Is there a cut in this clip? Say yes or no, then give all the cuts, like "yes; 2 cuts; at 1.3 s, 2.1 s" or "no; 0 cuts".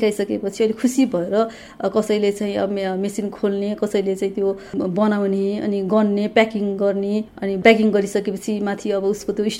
no; 0 cuts